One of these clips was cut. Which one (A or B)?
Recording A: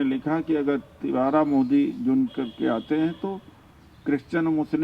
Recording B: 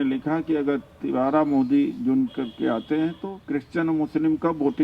B